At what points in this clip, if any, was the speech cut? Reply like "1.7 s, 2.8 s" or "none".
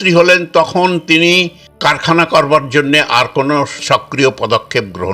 1.6 s, 3.8 s